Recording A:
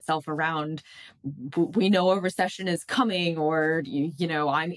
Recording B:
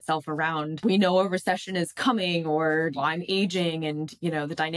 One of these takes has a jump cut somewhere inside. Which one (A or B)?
B